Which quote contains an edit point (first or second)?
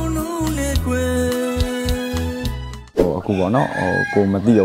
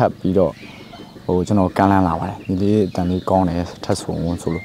first